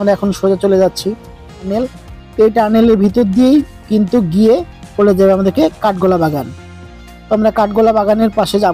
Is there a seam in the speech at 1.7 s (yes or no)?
yes